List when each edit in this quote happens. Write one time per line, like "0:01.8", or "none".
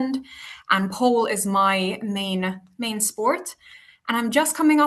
none